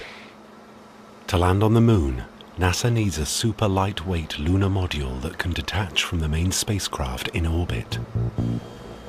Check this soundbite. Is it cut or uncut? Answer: cut